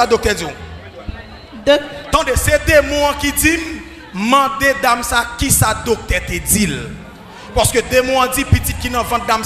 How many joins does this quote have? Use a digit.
0